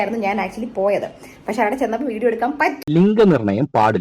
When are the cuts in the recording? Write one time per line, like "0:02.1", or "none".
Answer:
0:02.8